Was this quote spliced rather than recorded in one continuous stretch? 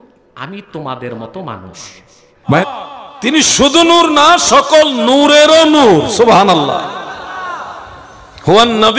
yes; 1 cut; at 2.5 s

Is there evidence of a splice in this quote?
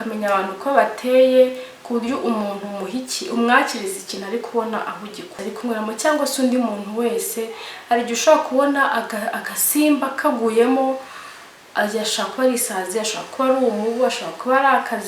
yes; 1 cut; at 5.3 s

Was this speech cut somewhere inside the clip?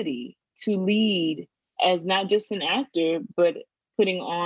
yes; 1 cut; at 1.7 s

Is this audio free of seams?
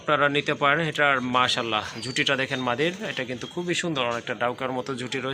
yes; 0 cuts

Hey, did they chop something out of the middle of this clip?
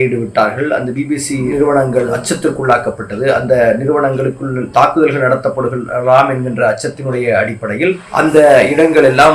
no; 0 cuts

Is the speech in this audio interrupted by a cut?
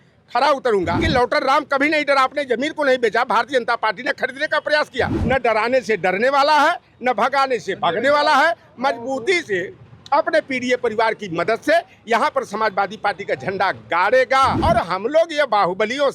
yes; 3 cuts; at 1.0 s, 5.2 s, 14.6 s

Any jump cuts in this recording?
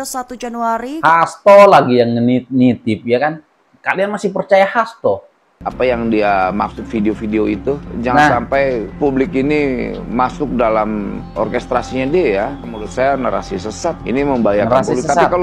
yes; 2 cuts; at 1.0 s, 5.7 s

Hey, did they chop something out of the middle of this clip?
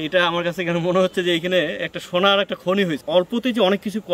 yes; 1 cut; at 3.0 s

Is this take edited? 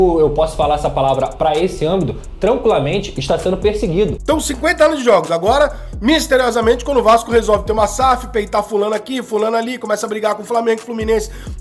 yes; 1 cut; at 4.2 s

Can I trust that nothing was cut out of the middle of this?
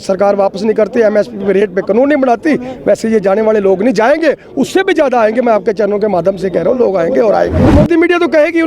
no; 1 cut; at 7.6 s

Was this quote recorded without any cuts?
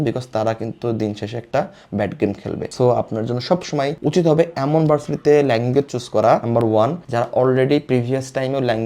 no; 1 cut; at 2.7 s

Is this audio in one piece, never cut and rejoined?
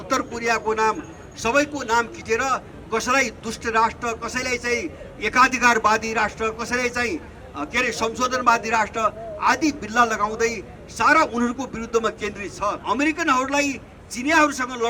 no; 1 cut; at 12.8 s

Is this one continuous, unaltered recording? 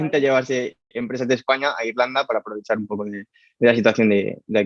yes; 0 cuts

